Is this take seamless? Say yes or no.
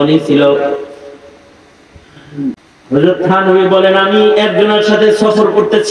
no